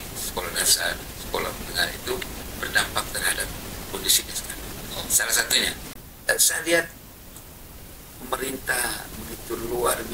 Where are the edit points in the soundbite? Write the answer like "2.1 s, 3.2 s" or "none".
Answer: 6.1 s